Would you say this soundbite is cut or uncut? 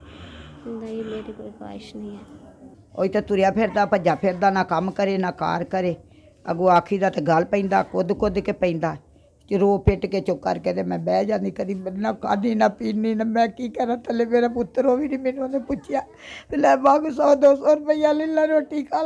cut